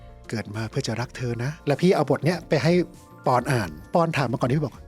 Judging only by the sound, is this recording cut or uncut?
cut